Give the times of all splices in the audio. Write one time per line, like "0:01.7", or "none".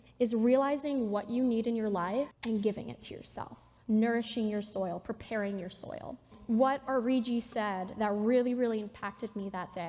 0:02.3
0:06.4